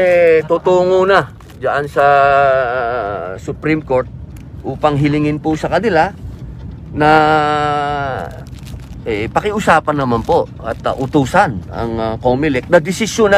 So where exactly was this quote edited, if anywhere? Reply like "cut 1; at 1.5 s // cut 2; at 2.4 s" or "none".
none